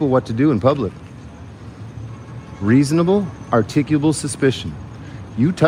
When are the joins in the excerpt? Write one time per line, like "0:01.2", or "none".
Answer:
none